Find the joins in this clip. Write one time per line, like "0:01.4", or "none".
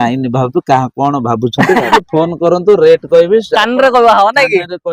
0:02.0